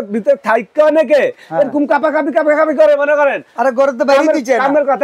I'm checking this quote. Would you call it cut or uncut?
uncut